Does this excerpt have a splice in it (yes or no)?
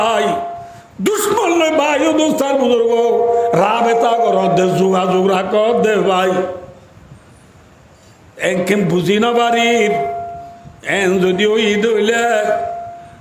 no